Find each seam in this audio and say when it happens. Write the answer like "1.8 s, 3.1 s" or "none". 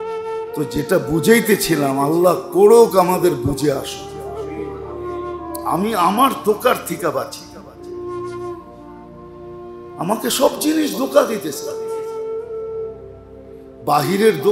3.8 s, 5.7 s, 11.5 s, 13.2 s